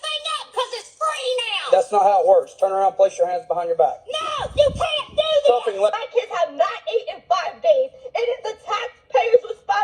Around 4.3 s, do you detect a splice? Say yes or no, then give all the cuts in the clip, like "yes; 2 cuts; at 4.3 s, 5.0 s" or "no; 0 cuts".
no; 1 cut; at 5.9 s